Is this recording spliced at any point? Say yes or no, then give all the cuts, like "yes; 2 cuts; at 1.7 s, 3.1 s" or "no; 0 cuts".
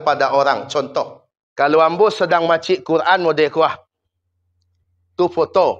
yes; 1 cut; at 0.9 s